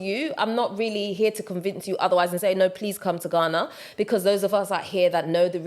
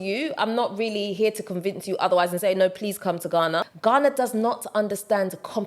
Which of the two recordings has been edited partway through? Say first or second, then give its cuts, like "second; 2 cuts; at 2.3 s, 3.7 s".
second; 1 cut; at 3.7 s